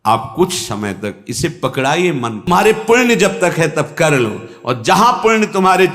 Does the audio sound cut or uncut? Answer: cut